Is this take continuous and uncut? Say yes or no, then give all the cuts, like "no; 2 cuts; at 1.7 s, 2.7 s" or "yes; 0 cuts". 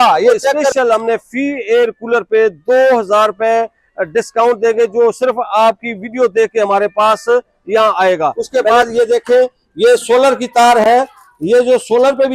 no; 2 cuts; at 0.7 s, 8.5 s